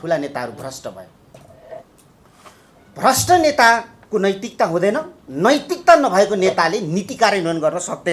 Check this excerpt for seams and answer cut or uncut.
uncut